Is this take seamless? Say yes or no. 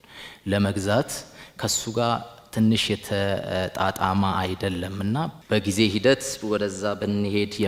yes